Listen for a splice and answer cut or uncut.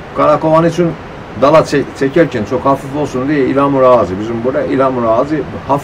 uncut